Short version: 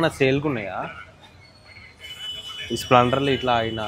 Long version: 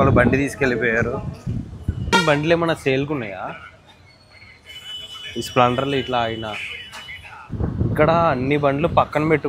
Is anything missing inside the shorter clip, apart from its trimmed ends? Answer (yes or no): no